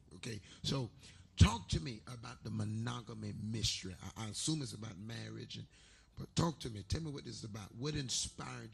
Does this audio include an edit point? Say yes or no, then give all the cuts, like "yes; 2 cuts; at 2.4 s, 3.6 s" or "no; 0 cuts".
yes; 1 cut; at 6.8 s